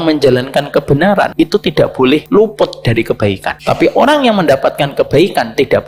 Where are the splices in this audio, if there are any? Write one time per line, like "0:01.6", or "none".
0:01.3
0:02.2
0:03.5